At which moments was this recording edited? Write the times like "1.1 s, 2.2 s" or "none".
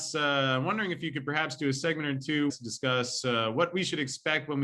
2.5 s